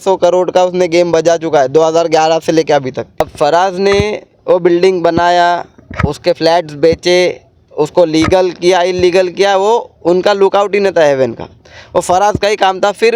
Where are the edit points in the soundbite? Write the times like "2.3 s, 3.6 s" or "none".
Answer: 3.2 s